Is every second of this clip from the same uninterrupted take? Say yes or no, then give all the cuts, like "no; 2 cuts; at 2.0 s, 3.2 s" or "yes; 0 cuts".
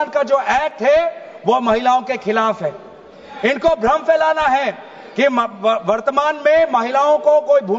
yes; 0 cuts